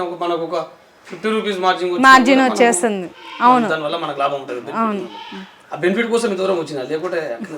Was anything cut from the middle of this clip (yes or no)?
no